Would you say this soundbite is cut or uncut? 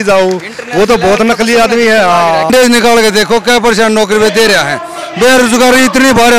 cut